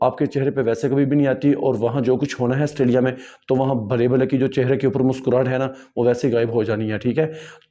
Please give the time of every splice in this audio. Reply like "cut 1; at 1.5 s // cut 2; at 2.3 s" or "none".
none